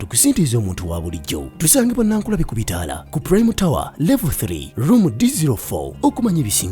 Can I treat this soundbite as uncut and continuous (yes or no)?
no